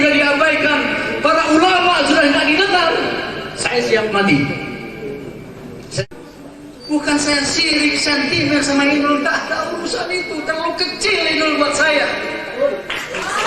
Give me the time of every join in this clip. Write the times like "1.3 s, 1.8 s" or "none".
6.0 s